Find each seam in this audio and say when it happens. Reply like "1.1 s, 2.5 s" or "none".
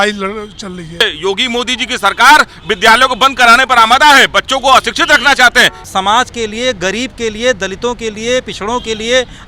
1.0 s, 5.8 s